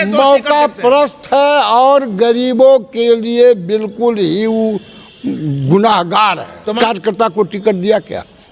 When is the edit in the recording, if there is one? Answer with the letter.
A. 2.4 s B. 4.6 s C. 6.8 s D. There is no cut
C